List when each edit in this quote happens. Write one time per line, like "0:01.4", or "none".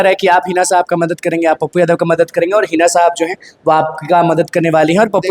none